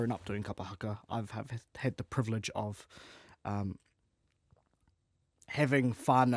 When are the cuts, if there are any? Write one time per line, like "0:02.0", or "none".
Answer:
none